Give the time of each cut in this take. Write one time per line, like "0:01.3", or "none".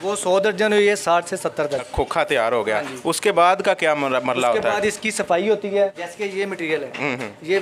0:01.9
0:06.0